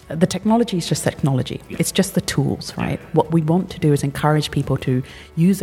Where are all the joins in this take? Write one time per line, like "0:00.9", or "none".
none